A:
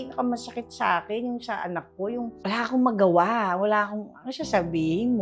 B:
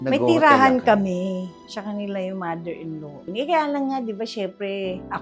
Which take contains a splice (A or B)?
B